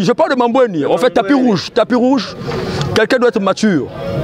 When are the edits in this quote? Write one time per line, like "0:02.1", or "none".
0:01.7